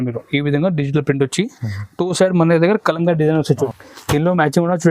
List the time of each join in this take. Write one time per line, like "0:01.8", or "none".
0:03.6